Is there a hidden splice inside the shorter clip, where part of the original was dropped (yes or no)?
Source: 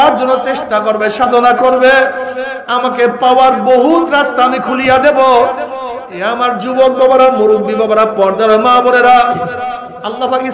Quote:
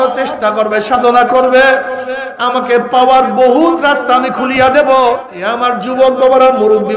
yes